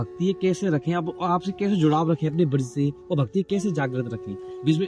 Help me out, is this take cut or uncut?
uncut